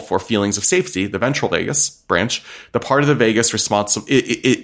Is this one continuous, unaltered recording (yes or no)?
yes